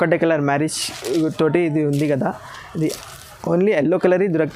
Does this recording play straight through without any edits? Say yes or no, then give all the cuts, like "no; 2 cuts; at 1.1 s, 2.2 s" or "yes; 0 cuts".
yes; 0 cuts